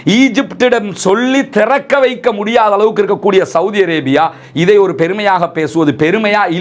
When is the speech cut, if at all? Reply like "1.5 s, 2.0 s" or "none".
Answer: none